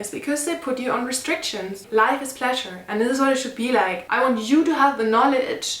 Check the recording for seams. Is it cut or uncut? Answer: cut